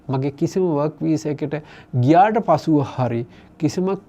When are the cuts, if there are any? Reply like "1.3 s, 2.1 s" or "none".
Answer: none